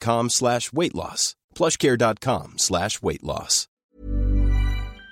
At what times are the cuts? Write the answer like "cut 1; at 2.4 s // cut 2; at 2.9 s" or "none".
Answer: cut 1; at 3.7 s